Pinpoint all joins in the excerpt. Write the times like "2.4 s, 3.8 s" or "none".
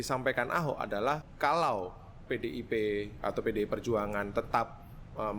1.3 s